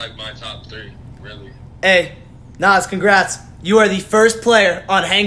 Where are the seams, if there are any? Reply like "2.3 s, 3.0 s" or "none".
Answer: 1.6 s